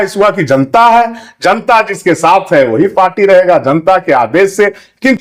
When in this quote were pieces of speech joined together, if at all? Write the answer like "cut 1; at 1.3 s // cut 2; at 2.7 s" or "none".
none